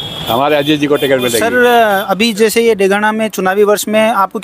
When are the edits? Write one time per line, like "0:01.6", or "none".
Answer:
0:01.4